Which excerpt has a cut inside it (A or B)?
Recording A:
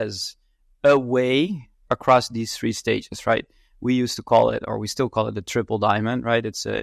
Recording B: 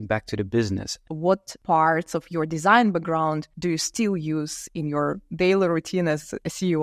B